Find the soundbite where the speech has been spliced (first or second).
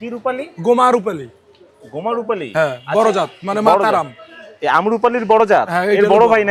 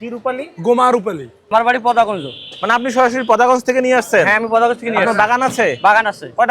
second